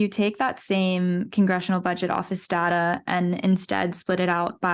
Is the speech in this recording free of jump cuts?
yes; 0 cuts

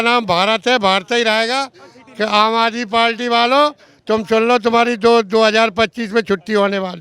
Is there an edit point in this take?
no; 0 cuts

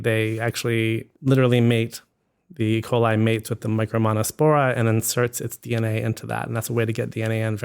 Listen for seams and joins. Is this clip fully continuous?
no; 1 cut; at 1.1 s

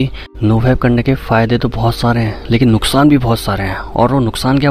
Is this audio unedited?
yes; 0 cuts

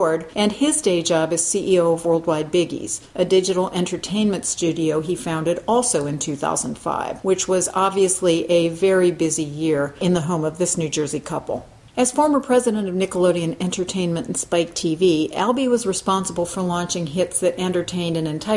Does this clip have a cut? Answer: yes; 1 cut; at 14.7 s

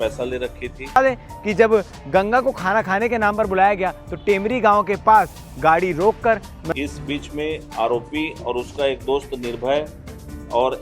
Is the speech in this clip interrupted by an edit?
yes; 2 cuts; at 1.0 s, 6.6 s

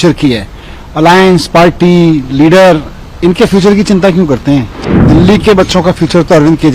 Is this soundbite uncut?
no; 1 cut; at 5.0 s

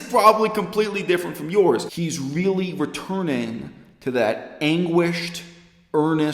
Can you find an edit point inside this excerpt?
yes; 1 cut; at 2.0 s

